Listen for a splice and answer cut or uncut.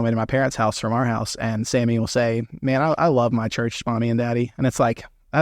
uncut